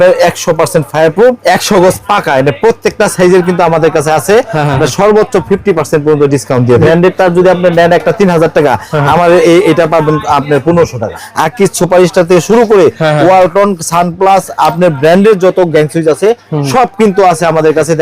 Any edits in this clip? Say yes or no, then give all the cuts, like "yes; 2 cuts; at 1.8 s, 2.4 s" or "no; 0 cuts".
yes; 3 cuts; at 1.4 s, 6.8 s, 11.2 s